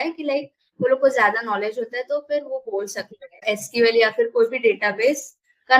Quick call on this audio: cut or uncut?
cut